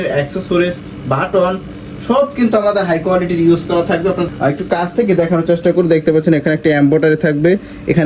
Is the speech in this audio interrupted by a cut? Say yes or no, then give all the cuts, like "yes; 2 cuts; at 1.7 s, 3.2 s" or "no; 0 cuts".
yes; 1 cut; at 4.2 s